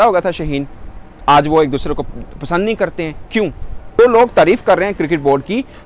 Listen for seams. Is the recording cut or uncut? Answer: cut